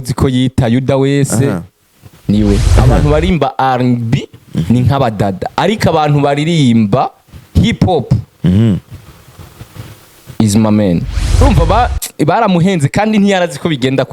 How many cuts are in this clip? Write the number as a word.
two